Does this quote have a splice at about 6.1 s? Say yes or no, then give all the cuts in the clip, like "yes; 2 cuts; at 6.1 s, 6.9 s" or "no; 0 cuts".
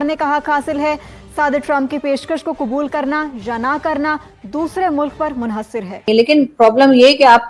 yes; 1 cut; at 6.1 s